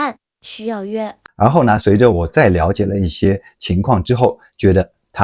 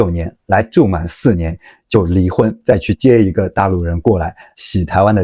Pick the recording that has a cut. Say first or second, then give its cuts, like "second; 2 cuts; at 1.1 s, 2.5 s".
first; 1 cut; at 1.2 s